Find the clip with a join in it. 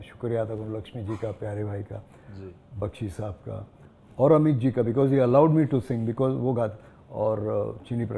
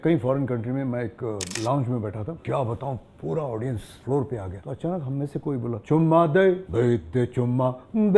second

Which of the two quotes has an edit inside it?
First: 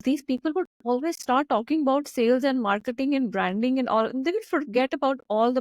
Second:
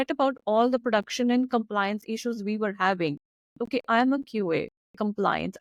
first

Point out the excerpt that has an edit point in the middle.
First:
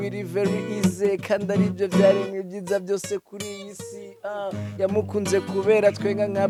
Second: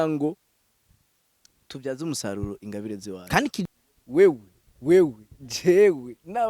second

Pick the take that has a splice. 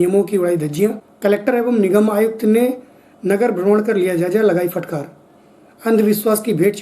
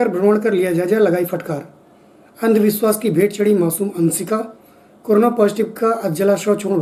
first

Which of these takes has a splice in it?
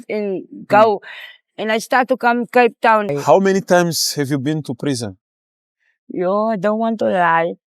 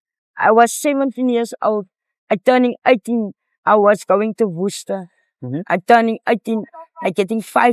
first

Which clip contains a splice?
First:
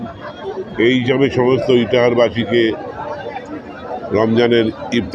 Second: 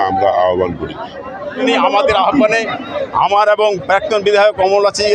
second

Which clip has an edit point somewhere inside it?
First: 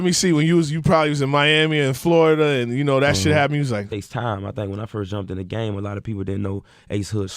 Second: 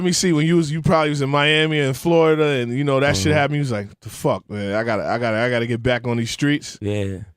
second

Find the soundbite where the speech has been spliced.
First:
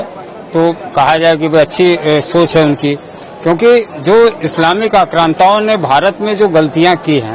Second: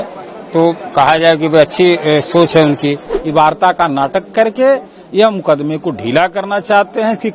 second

